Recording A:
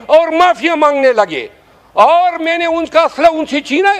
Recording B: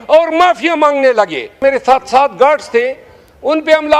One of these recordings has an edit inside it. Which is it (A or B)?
B